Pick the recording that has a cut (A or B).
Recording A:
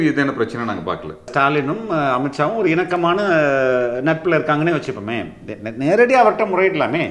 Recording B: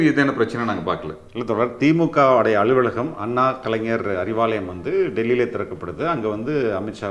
A